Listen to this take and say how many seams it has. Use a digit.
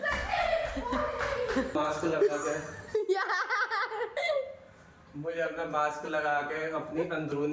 1